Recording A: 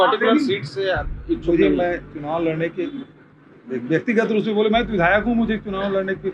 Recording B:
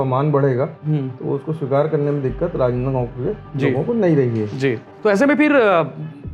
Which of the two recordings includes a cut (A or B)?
B